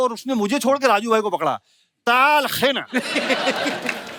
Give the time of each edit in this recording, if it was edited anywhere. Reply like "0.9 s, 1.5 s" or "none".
none